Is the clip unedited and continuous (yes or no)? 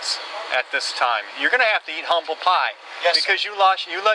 yes